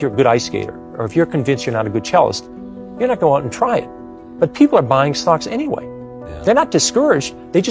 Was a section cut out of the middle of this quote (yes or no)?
no